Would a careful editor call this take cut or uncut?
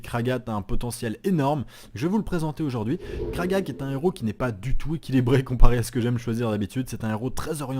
cut